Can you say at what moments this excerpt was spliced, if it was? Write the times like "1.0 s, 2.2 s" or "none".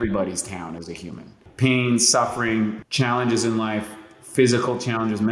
1.4 s, 2.8 s